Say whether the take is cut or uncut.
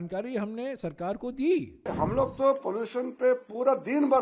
cut